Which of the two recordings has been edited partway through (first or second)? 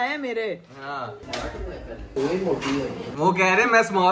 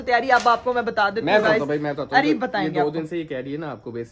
first